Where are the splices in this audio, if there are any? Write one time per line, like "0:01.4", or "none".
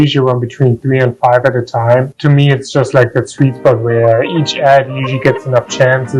none